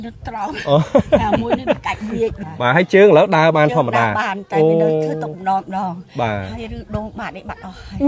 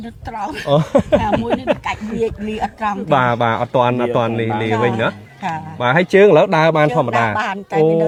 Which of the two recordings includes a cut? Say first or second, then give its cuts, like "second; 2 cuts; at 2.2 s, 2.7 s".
first; 1 cut; at 2.4 s